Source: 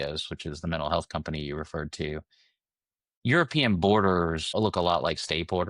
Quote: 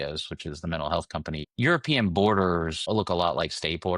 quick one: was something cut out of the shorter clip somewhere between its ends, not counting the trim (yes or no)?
yes